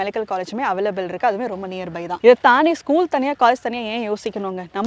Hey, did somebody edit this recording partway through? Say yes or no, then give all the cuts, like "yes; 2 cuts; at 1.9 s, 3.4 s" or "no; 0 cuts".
no; 0 cuts